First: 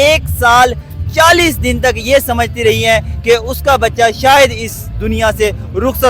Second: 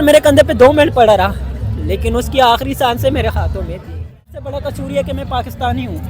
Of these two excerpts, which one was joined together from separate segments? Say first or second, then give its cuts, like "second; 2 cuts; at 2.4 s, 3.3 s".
second; 1 cut; at 4.3 s